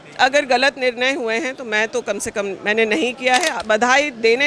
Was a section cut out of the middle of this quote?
yes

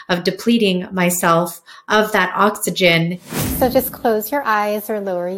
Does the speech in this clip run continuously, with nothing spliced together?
no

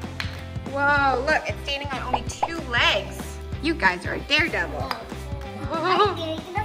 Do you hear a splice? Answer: yes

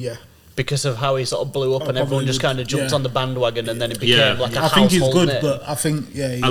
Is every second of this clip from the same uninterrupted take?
yes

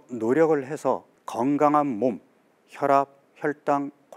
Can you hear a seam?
yes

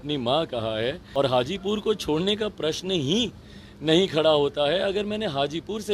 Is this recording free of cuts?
no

